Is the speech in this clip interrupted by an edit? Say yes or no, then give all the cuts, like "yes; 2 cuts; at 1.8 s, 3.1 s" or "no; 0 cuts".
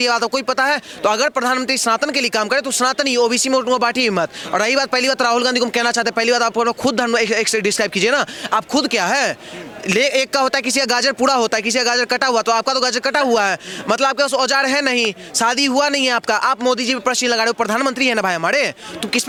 no; 0 cuts